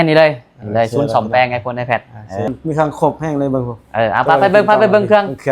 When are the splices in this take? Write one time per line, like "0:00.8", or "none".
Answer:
0:02.5